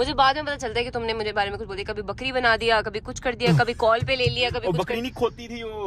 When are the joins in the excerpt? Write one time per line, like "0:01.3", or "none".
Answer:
none